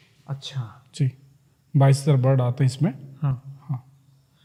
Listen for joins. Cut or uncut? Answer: uncut